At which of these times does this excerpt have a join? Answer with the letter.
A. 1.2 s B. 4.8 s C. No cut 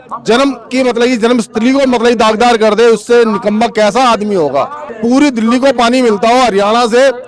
B